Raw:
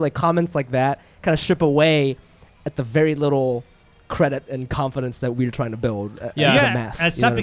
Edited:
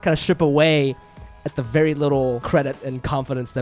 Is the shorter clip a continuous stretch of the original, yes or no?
no